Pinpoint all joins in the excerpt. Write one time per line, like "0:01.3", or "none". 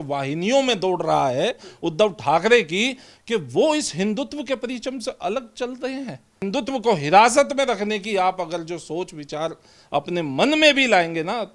0:06.4

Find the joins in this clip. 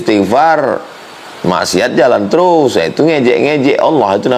none

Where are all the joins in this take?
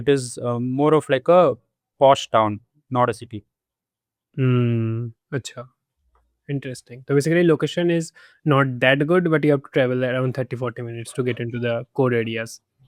none

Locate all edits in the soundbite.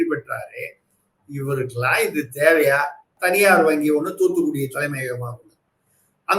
0:03.1

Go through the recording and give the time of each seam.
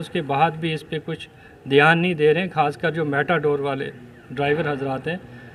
none

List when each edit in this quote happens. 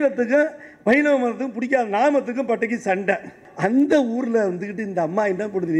0:03.5

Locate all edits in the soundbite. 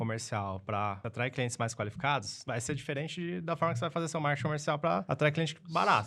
0:01.0
0:02.3
0:05.0

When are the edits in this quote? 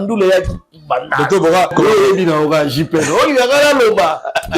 0:01.7

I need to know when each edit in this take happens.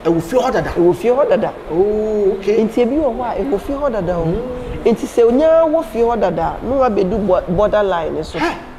none

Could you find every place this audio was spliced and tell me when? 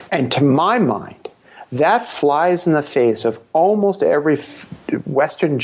none

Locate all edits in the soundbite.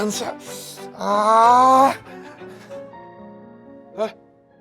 0:02.6

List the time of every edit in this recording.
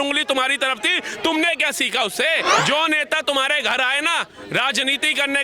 0:02.5

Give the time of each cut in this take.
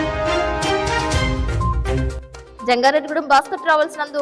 none

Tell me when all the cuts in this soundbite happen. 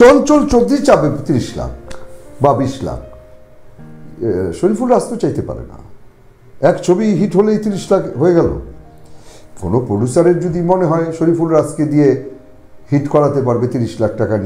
none

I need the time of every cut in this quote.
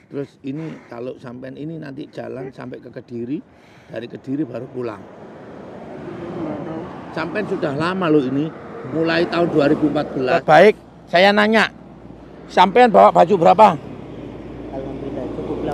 0:10.4

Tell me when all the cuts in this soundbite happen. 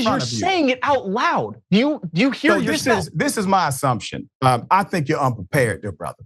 0:01.8

